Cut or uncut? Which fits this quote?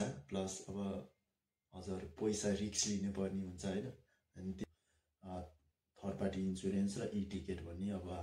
cut